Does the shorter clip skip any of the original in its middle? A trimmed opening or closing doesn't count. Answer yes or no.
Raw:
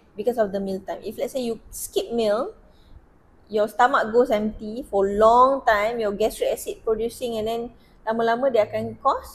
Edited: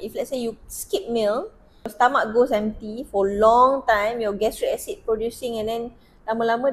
yes